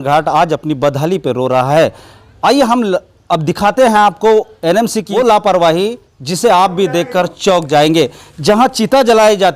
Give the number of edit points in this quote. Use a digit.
1